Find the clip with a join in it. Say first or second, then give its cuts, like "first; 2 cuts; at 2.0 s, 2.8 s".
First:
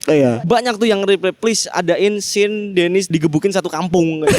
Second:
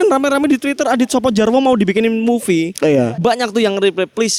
first; 1 cut; at 3.1 s